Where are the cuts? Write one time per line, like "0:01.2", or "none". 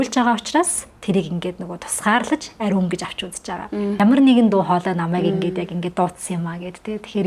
0:04.0